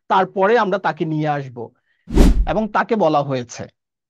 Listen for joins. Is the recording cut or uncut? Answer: cut